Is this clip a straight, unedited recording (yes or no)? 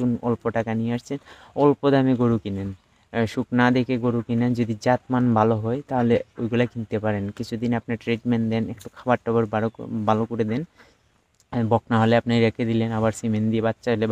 yes